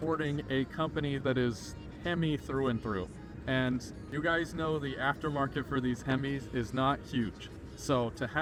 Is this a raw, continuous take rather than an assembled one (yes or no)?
yes